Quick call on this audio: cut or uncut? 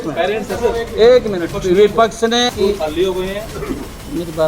cut